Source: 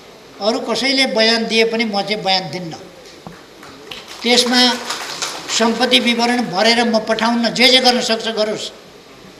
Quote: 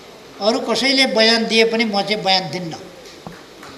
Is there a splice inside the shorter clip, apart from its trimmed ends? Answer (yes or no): no